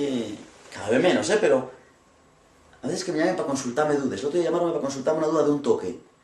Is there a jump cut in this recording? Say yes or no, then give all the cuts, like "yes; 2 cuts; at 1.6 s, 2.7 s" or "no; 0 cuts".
yes; 1 cut; at 3.5 s